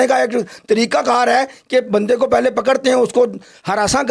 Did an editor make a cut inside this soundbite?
no; 0 cuts

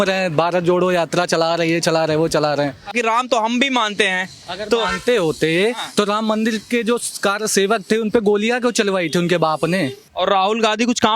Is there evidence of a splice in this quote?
yes; 2 cuts; at 2.9 s, 10.0 s

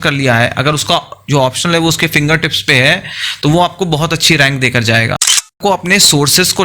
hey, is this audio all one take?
no; 1 cut; at 5.5 s

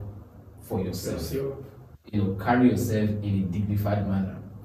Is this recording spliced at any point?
no; 0 cuts

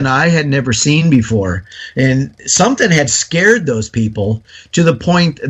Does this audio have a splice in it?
no; 0 cuts

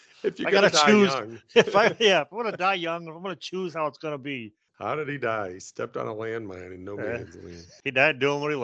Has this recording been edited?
yes; 1 cut; at 7.7 s

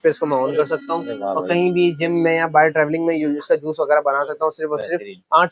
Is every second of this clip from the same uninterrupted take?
yes; 0 cuts

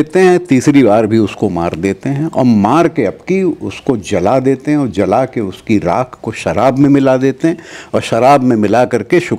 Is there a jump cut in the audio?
no; 0 cuts

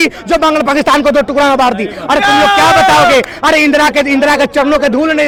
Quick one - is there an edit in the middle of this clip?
no; 0 cuts

